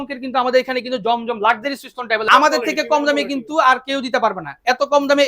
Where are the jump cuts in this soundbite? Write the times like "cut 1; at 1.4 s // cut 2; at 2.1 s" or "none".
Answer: cut 1; at 2.2 s